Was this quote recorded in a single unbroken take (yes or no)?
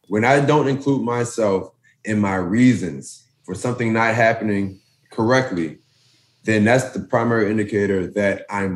yes